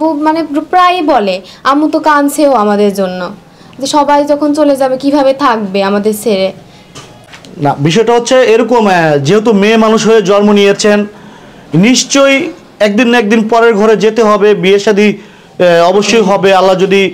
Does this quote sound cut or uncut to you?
uncut